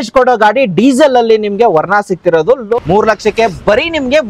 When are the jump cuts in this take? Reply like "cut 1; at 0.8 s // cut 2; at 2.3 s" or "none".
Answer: cut 1; at 2.7 s